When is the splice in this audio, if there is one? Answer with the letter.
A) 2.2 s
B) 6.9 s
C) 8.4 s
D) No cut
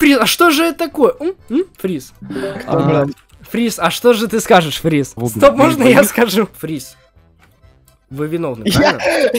D